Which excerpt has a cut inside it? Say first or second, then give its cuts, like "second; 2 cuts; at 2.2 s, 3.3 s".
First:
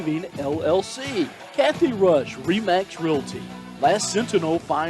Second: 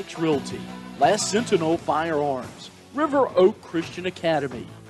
first; 1 cut; at 1.4 s